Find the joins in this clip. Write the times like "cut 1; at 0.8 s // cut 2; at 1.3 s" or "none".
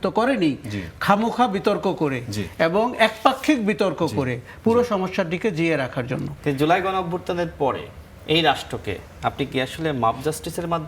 cut 1; at 6.3 s